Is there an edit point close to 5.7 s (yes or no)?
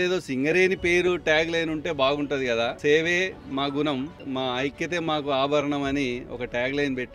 no